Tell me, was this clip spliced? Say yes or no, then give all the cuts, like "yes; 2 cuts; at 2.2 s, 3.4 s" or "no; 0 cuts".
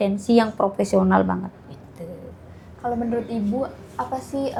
no; 0 cuts